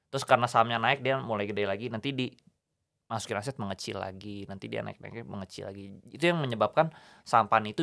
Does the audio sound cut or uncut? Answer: uncut